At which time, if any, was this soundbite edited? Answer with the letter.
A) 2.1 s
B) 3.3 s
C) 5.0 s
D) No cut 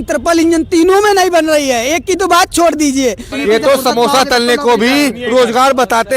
B